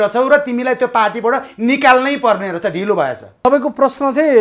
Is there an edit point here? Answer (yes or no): yes